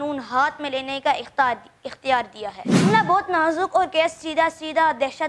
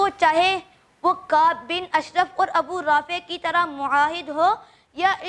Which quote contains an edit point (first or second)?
first